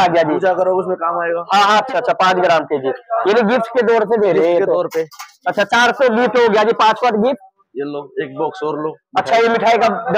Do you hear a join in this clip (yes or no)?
yes